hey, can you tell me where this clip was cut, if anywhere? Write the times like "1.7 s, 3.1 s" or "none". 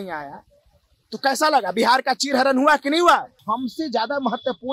3.4 s